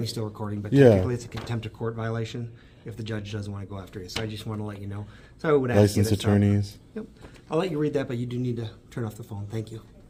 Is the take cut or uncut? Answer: uncut